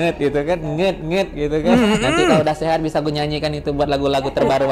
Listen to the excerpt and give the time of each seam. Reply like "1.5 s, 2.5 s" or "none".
none